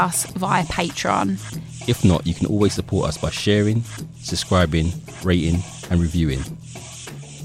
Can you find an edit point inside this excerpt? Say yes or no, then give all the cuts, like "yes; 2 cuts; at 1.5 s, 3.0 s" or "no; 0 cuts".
yes; 1 cut; at 6.4 s